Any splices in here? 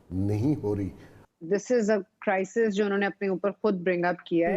yes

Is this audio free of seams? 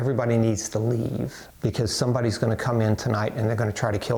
yes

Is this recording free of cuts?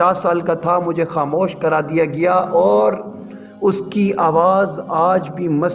yes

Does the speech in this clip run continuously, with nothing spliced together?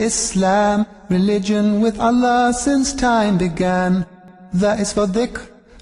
yes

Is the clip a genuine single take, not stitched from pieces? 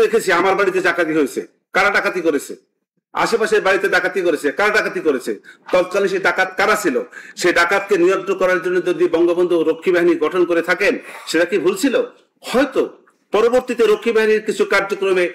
yes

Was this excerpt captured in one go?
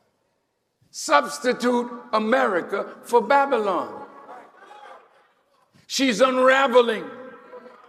yes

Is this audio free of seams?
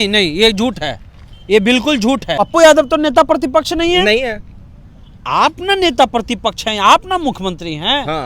no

